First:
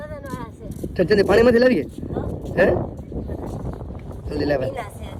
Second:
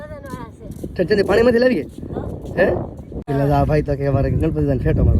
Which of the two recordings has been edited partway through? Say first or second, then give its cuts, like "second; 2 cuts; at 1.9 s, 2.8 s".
second; 1 cut; at 3.1 s